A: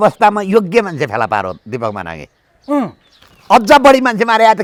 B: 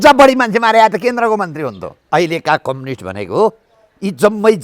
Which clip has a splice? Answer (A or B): B